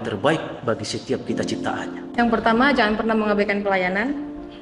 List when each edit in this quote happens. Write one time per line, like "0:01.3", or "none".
0:01.9